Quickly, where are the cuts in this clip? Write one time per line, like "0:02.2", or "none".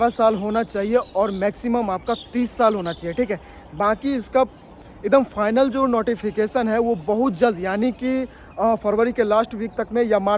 none